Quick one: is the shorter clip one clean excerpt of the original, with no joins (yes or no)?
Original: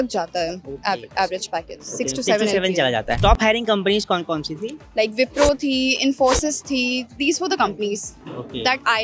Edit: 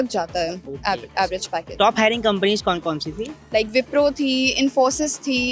no